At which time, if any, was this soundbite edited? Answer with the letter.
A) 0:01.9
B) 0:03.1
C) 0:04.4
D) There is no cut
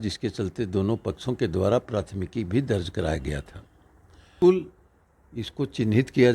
C